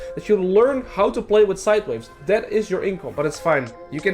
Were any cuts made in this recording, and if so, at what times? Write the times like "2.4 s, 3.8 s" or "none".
3.1 s

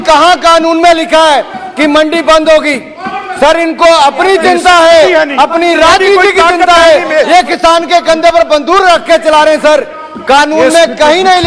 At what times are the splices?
none

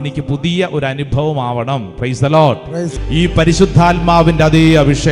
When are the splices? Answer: 2.9 s

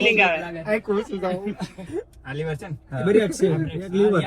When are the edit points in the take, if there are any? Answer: 1.8 s

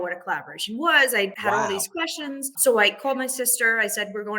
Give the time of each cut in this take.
1.4 s, 2.5 s

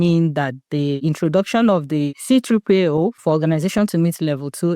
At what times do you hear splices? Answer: 1.0 s, 2.2 s, 3.2 s

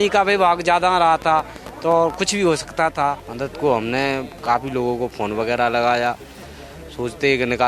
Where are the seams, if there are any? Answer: 3.3 s

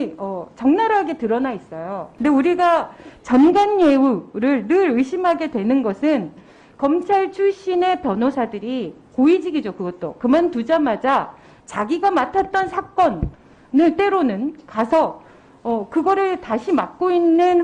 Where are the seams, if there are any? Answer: 2.1 s

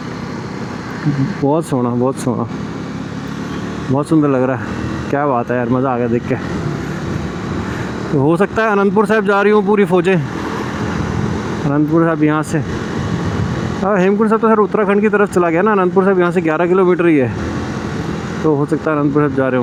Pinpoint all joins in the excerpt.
none

